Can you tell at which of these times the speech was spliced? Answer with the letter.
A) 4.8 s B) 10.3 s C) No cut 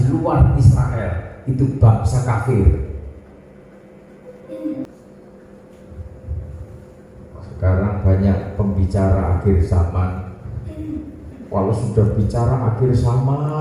A